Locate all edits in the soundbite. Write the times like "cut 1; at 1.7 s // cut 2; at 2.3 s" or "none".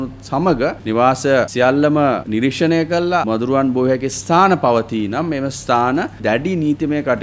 cut 1; at 0.8 s // cut 2; at 1.5 s // cut 3; at 2.2 s // cut 4; at 3.2 s // cut 5; at 6.2 s